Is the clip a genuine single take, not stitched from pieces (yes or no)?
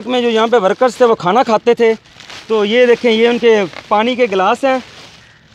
yes